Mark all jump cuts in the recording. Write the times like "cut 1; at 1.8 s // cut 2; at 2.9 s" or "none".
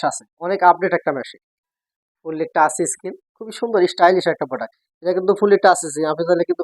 cut 1; at 2.1 s

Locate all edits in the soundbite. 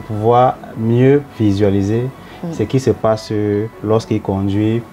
cut 1; at 1.3 s // cut 2; at 3.7 s

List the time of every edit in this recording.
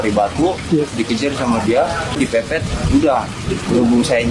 cut 1; at 2.3 s

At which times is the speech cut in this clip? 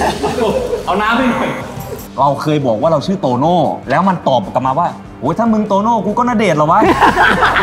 cut 1; at 2.0 s

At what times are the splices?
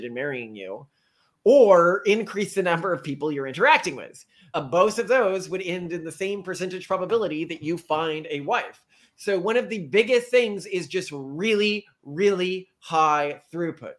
none

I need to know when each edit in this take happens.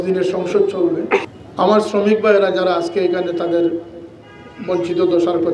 cut 1; at 1.4 s

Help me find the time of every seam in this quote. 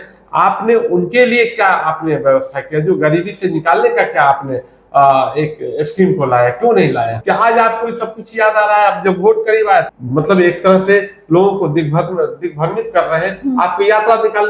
cut 1; at 7.2 s // cut 2; at 10.0 s

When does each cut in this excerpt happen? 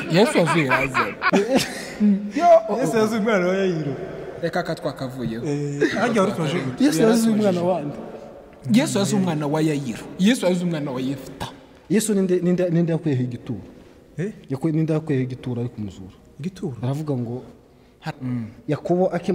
cut 1; at 18.0 s

